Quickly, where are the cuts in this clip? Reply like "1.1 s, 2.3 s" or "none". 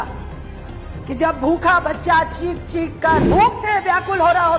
3.2 s